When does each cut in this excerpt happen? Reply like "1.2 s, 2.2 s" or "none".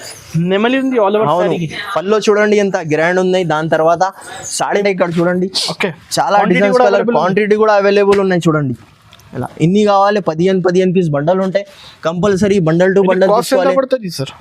4.8 s